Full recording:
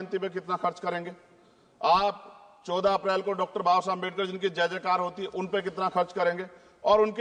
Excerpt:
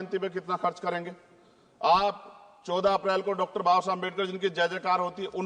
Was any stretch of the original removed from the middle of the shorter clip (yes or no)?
no